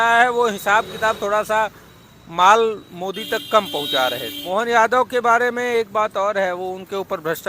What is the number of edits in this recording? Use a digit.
1